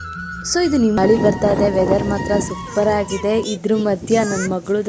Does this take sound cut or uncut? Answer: cut